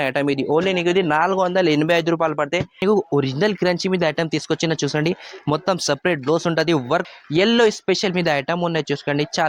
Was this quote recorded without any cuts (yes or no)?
no